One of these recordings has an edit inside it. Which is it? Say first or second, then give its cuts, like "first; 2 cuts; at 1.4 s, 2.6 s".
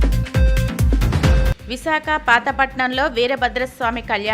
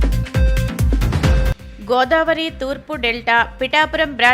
first; 1 cut; at 1.5 s